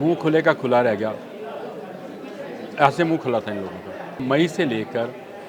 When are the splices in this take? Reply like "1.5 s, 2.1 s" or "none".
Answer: 4.1 s